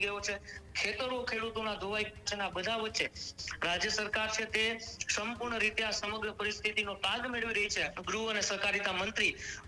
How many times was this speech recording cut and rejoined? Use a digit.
1